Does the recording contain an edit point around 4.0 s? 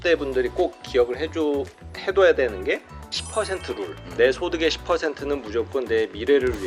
yes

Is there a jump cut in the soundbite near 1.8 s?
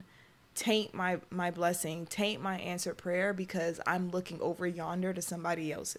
no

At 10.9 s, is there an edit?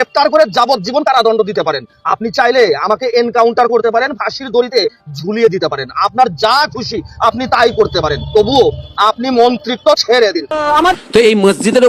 yes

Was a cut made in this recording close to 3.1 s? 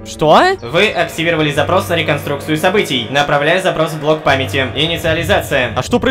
yes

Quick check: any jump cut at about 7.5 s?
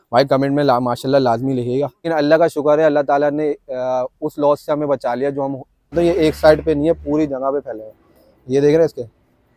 no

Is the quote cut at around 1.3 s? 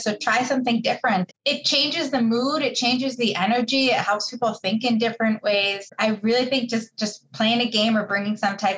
yes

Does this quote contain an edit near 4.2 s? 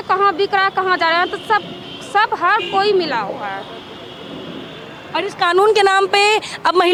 no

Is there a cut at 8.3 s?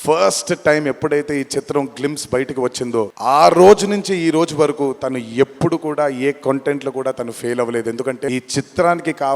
yes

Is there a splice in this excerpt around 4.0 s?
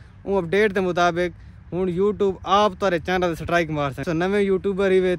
yes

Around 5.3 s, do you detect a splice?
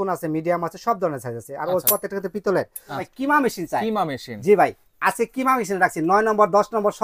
no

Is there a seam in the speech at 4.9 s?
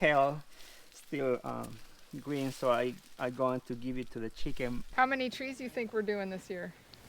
yes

